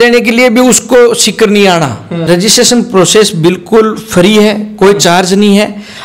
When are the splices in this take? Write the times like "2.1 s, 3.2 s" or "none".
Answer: 2.1 s